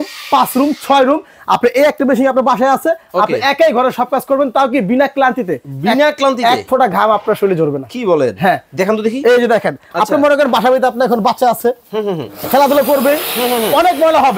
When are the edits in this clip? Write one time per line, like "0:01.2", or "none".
none

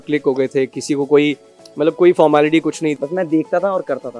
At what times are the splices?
0:02.9

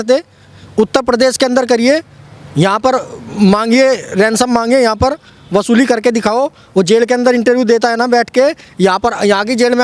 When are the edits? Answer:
none

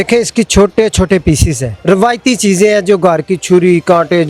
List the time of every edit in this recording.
0:01.7

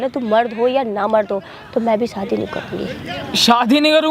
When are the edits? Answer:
none

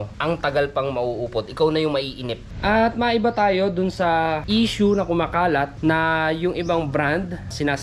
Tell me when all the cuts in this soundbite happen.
0:02.5
0:04.4

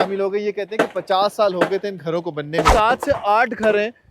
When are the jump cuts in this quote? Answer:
0:02.7

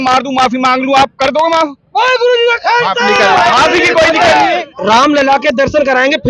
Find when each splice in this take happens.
0:04.7

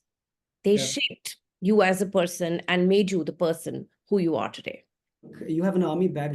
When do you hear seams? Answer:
0:05.4

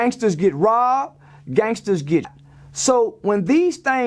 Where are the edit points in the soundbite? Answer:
0:02.3

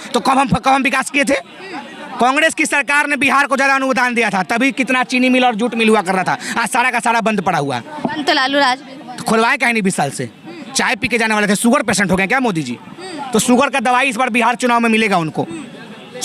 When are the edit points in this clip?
none

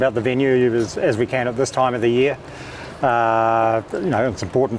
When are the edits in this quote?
none

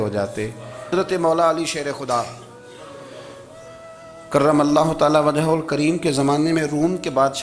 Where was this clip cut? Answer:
0:00.9

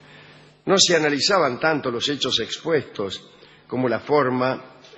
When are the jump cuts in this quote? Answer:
none

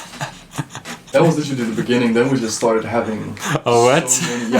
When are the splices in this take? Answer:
0:01.1

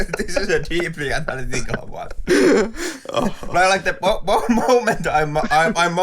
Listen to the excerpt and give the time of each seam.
0:02.2

